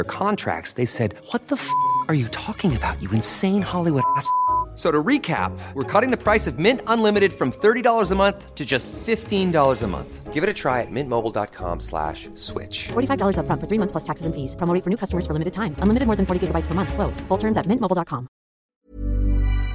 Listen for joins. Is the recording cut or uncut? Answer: uncut